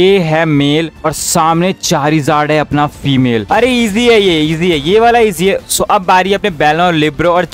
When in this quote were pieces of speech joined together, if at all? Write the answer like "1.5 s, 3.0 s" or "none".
3.5 s, 5.6 s